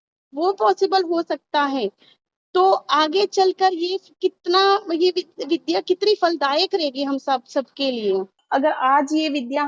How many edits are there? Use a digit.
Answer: 1